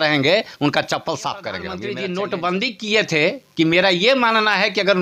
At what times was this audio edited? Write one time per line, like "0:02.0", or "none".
0:01.7